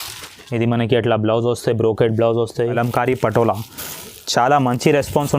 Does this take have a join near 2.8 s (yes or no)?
yes